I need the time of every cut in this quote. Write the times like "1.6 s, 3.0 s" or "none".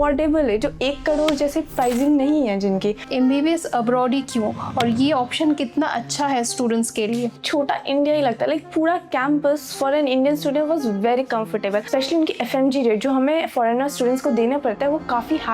3.1 s, 7.4 s, 11.9 s